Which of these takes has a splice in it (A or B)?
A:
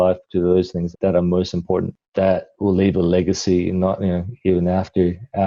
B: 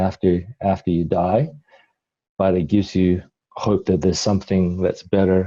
A